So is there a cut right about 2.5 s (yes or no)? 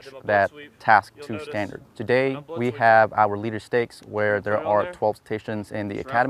yes